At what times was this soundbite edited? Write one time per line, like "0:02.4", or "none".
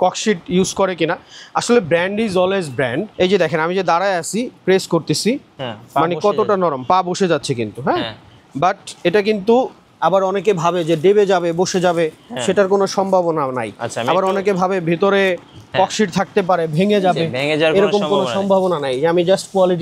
0:03.1